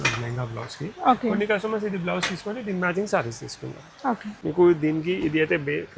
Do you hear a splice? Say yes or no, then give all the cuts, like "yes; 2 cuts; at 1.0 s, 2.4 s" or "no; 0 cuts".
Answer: yes; 1 cut; at 4.3 s